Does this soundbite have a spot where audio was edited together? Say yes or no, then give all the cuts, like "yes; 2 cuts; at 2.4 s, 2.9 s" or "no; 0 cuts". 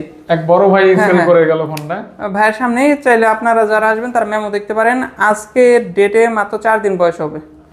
no; 0 cuts